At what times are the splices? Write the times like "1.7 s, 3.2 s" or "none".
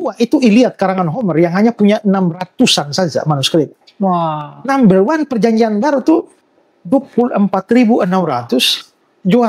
none